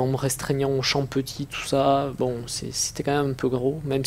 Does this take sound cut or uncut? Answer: uncut